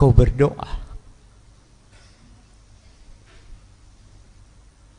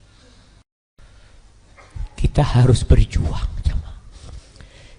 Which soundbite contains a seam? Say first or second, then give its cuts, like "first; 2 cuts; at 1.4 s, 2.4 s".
second; 1 cut; at 1.0 s